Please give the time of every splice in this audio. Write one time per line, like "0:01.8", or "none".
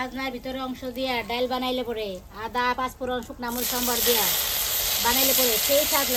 none